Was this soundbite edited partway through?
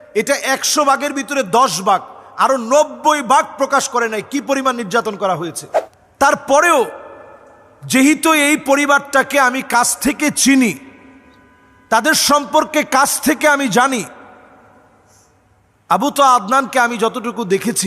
yes; 1 cut; at 5.9 s

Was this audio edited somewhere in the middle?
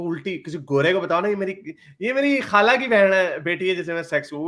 no; 0 cuts

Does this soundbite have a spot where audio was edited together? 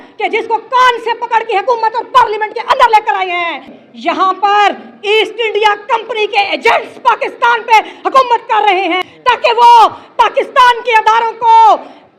yes; 2 cuts; at 3.7 s, 9.1 s

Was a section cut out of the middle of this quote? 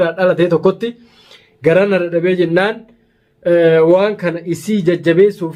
no; 0 cuts

